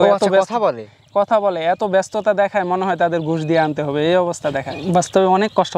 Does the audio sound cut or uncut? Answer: cut